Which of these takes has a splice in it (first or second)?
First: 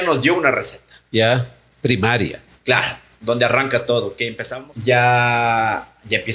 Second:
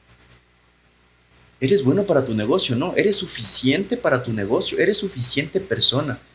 first